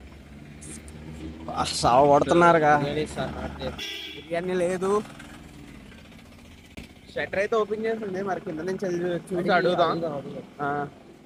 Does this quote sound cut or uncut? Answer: uncut